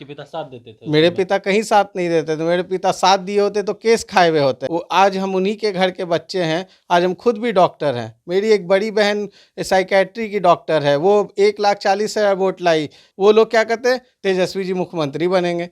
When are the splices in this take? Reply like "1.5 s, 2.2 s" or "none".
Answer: 4.7 s, 13.0 s